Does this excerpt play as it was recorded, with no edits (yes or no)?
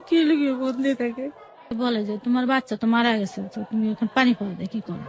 no